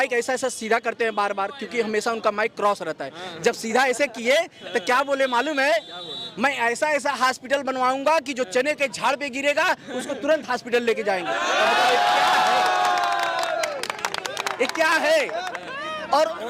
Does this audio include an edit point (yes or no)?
no